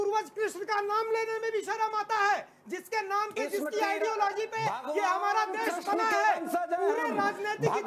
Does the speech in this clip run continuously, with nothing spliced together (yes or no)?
yes